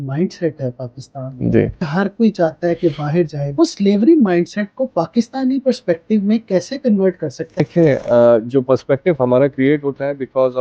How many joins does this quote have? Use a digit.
3